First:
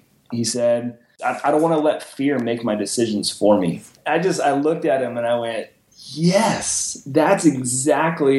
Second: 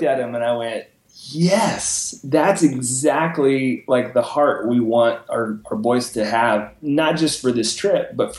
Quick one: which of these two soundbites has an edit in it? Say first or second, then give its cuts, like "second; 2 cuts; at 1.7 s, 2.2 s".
first; 2 cuts; at 1.1 s, 3.9 s